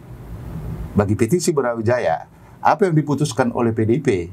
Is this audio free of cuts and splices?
yes; 0 cuts

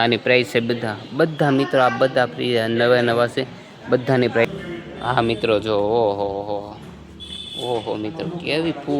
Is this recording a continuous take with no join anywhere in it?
no; 1 cut; at 4.4 s

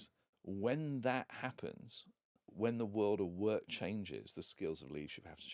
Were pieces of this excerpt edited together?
yes; 1 cut; at 2.5 s

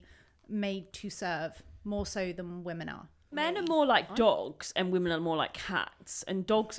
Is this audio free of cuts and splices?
no; 1 cut; at 3.4 s

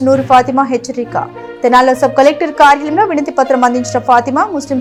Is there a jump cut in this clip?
no; 0 cuts

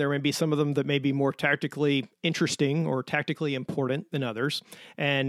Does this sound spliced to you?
no; 0 cuts

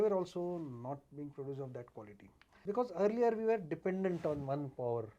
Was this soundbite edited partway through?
yes; 1 cut; at 2.6 s

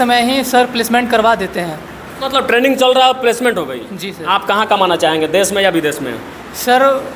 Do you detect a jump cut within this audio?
no; 0 cuts

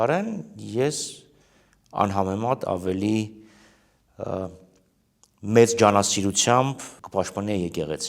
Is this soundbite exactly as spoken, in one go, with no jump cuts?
no; 1 cut; at 7.0 s

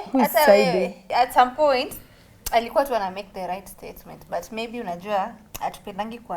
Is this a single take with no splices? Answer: no; 1 cut; at 1.0 s

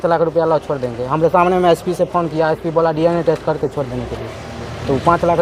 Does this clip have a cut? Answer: no; 0 cuts

